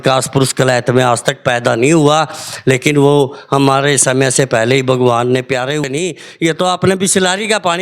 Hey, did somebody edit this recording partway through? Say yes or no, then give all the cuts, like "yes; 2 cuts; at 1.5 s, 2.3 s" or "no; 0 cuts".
yes; 1 cut; at 5.8 s